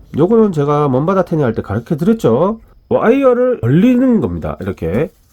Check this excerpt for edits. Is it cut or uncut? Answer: cut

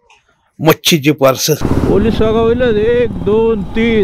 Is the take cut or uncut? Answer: cut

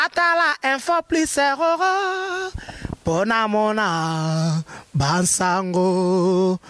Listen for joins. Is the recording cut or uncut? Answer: uncut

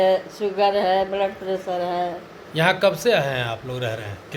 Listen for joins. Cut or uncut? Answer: uncut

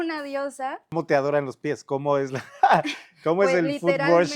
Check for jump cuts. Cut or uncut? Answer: cut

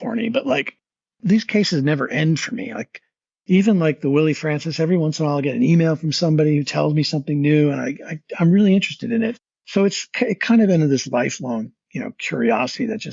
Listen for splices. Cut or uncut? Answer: uncut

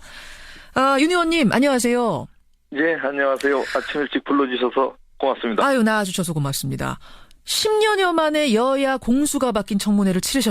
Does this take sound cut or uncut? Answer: cut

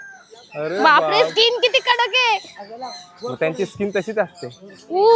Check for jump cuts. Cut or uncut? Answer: uncut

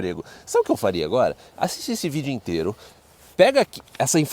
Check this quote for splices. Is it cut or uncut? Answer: uncut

